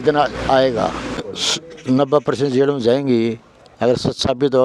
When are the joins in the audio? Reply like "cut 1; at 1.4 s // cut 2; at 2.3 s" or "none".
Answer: cut 1; at 1.2 s